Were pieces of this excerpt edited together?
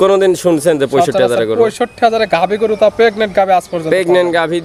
no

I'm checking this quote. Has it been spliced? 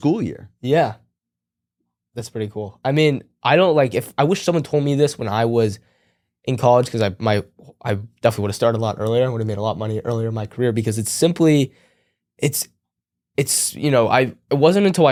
no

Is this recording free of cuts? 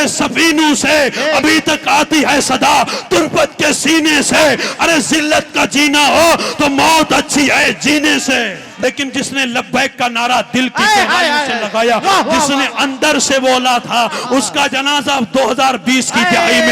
no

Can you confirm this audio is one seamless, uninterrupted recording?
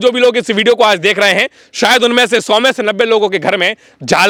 yes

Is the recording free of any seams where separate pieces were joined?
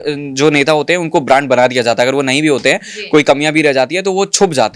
yes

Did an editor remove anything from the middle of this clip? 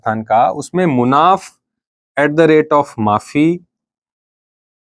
no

